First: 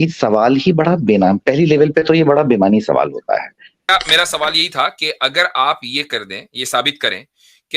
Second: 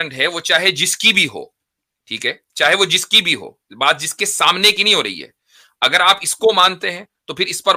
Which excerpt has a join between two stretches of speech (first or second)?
first